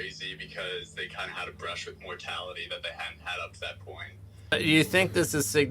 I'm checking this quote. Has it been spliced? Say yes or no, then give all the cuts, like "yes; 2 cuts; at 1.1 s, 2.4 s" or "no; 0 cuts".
yes; 1 cut; at 4.5 s